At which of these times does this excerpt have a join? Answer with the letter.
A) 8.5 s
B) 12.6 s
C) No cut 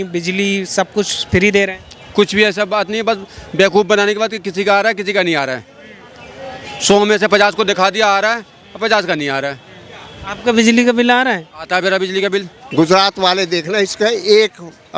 B